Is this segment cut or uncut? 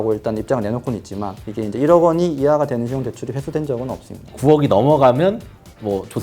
cut